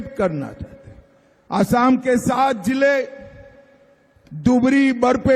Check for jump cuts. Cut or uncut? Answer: uncut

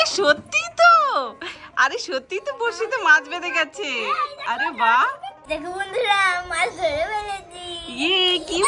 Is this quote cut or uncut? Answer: cut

